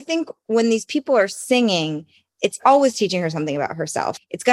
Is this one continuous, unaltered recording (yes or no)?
no